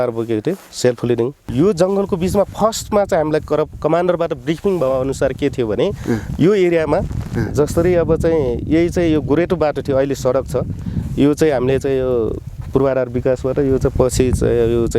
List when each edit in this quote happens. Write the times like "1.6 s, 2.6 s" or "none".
1.4 s